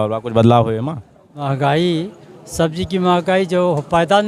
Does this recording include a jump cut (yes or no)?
yes